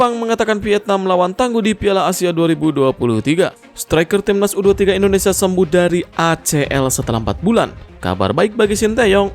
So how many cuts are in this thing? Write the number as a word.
one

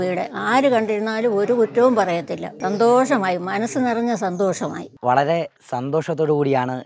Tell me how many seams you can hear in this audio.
zero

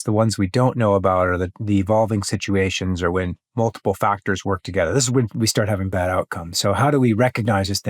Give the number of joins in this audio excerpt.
one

